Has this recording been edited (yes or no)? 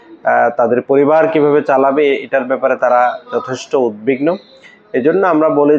no